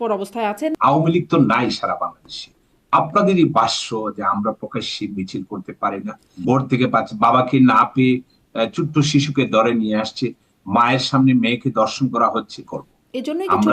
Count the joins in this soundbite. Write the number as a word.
three